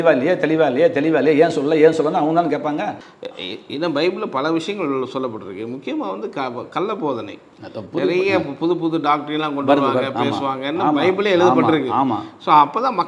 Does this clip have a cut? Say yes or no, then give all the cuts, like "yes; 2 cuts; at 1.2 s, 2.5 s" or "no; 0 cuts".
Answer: no; 0 cuts